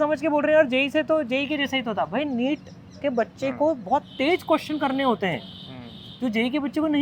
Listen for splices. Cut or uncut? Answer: uncut